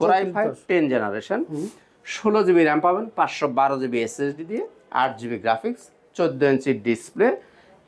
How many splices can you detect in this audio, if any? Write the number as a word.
zero